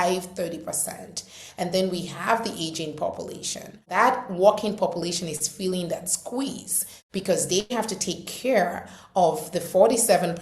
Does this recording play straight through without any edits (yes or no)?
no